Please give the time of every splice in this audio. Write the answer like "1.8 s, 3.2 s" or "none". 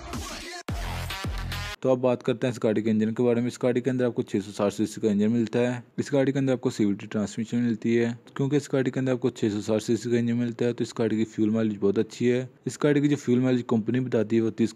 1.4 s